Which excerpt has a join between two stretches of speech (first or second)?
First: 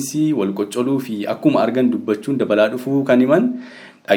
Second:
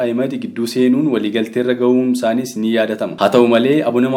second